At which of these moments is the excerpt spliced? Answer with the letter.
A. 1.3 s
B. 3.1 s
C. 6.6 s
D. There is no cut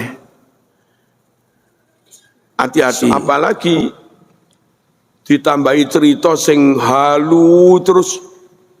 B